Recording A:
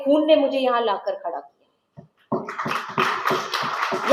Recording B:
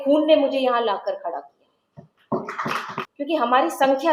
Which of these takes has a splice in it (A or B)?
B